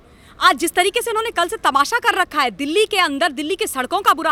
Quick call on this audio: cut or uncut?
uncut